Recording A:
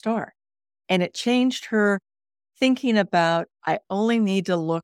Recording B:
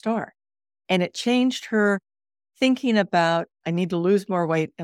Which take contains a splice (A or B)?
B